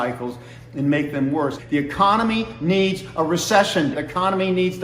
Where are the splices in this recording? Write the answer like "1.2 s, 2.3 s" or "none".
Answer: 1.6 s, 3.9 s